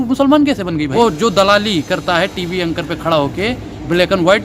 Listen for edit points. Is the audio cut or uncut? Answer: cut